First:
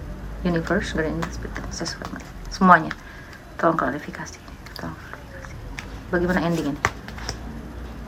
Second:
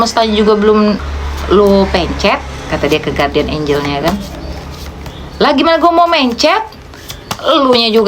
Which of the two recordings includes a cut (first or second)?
second